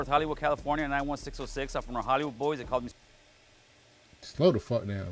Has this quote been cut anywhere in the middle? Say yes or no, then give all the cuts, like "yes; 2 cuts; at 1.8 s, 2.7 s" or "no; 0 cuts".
no; 0 cuts